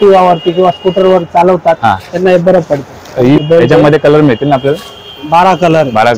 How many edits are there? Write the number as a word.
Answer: one